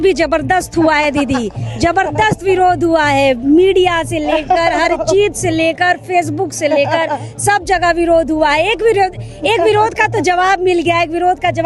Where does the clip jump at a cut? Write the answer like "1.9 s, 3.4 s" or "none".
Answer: none